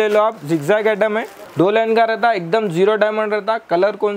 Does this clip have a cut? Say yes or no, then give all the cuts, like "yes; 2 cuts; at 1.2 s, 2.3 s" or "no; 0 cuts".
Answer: yes; 1 cut; at 1.4 s